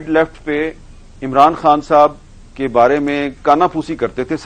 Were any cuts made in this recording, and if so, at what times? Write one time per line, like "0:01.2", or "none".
none